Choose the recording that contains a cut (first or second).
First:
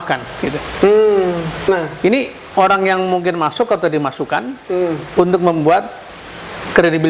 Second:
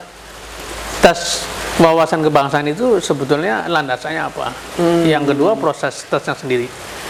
first